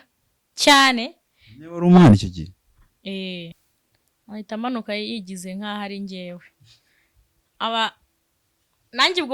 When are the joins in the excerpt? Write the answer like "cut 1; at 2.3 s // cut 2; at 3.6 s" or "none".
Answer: cut 1; at 3.6 s